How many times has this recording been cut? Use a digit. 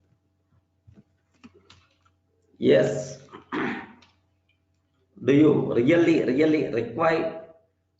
0